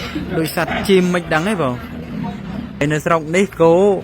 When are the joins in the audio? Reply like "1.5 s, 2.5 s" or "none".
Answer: 2.8 s